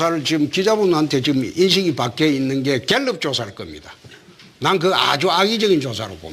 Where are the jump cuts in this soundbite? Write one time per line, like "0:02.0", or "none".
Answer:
0:04.9